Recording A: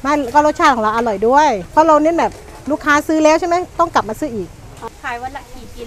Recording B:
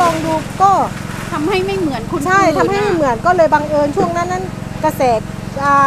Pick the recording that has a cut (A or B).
A